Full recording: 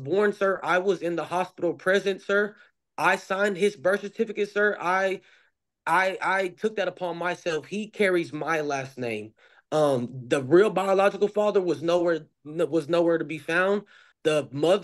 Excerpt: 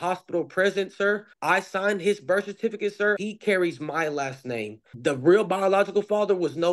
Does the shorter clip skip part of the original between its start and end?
yes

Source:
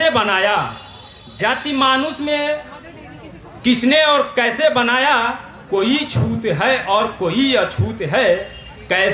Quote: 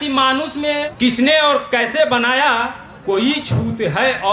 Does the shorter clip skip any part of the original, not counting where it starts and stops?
yes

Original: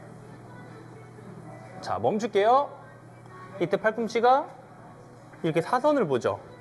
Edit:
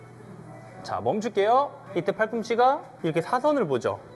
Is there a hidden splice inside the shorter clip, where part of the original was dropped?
yes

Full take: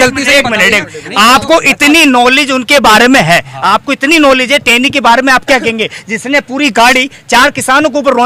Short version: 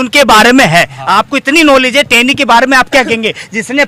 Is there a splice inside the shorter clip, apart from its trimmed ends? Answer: no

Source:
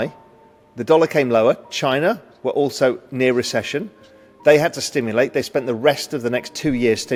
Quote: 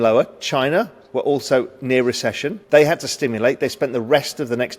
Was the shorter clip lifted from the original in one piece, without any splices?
no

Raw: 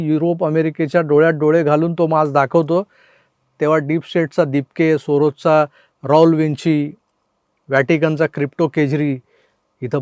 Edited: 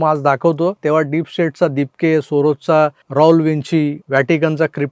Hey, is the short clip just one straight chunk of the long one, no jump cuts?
no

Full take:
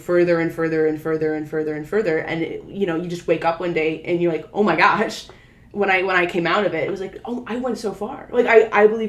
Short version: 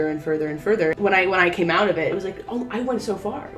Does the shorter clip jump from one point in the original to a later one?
yes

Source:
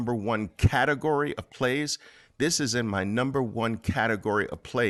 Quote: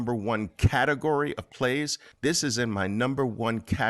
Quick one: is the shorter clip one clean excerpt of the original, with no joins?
no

